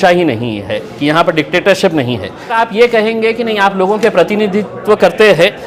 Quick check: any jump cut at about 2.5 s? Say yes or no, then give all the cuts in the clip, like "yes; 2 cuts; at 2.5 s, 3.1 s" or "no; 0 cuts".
yes; 1 cut; at 2.5 s